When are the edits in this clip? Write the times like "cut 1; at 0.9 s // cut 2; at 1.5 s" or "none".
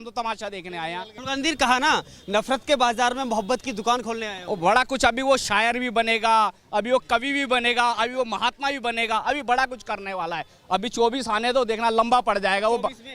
cut 1; at 1.2 s